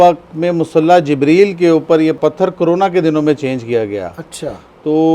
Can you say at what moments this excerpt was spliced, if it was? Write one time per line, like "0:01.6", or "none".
0:02.2